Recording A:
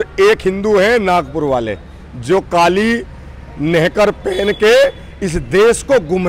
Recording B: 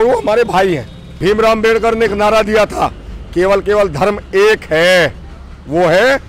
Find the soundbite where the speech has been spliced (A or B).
B